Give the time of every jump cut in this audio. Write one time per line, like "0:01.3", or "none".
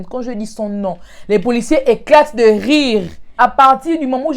0:03.2